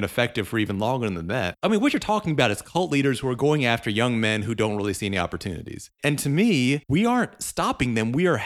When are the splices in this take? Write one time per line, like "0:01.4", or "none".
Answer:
0:01.6
0:05.9
0:06.8